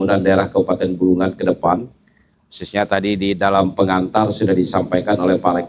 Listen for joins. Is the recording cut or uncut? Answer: uncut